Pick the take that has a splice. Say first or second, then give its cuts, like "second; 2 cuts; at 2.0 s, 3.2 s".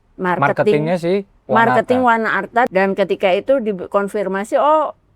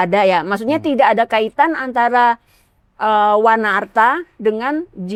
first; 1 cut; at 2.7 s